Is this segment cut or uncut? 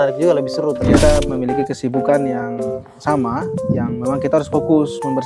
cut